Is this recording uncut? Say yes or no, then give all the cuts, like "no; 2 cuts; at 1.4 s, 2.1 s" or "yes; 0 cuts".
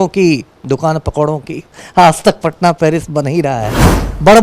no; 1 cut; at 1.8 s